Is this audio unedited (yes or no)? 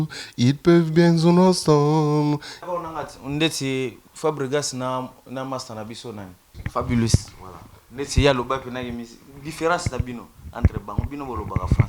no